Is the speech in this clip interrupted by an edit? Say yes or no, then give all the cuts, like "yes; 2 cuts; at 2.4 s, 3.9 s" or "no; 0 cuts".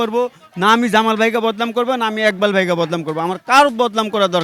no; 0 cuts